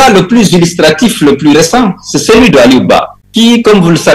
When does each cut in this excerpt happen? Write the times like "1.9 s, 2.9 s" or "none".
3.2 s